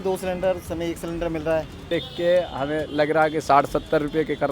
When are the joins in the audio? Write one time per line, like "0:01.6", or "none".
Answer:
0:01.8